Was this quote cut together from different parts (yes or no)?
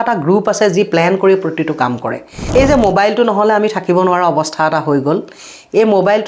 yes